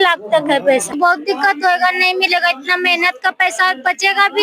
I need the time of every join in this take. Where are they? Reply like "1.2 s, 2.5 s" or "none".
0.9 s